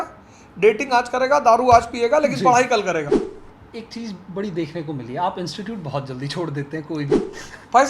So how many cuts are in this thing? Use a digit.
1